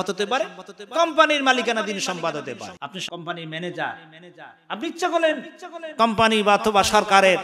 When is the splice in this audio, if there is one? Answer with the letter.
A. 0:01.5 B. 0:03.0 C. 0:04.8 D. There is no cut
B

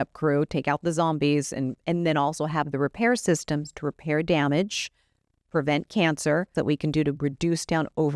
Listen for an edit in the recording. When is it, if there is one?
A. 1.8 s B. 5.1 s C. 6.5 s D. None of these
C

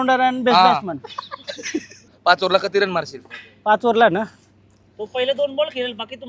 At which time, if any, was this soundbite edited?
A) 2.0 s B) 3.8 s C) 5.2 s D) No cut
A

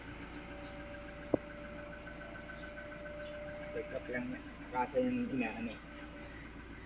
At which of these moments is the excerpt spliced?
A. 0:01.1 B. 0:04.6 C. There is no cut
C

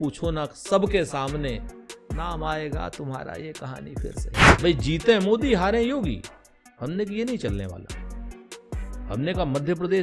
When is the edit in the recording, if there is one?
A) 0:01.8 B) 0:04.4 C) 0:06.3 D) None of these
B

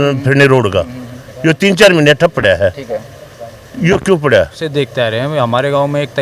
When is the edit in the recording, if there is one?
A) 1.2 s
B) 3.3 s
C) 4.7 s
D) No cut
C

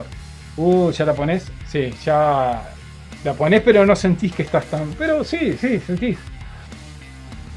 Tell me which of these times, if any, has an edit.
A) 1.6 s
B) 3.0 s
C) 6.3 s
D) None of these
A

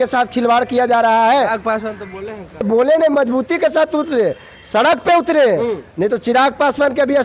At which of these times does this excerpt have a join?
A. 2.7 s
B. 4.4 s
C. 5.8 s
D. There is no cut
A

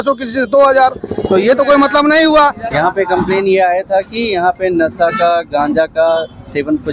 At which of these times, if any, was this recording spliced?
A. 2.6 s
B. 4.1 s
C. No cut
A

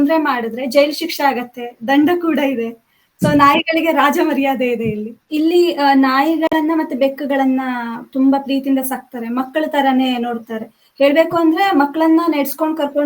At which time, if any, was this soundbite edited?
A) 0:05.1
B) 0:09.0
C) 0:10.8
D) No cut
A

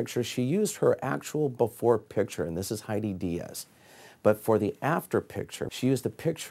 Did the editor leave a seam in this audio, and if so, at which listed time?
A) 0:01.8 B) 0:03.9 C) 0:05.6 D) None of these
C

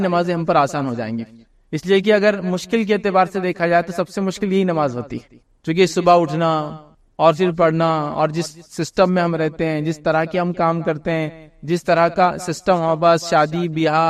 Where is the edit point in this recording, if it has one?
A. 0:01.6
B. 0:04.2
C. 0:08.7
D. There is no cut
D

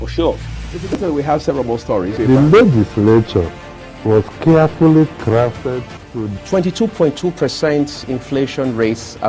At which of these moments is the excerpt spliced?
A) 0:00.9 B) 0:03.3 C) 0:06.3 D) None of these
A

